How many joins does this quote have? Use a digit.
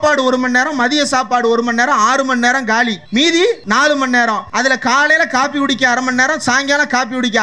3